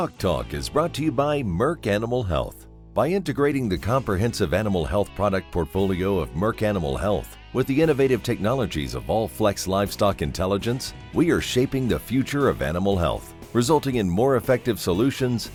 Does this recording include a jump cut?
no; 0 cuts

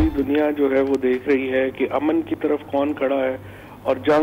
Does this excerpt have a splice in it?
no; 0 cuts

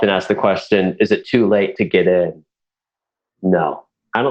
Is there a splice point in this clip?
no; 0 cuts

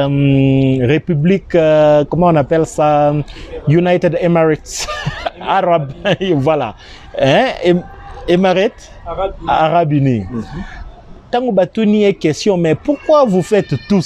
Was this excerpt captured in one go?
yes; 0 cuts

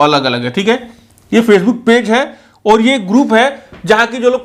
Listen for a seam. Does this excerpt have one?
no; 0 cuts

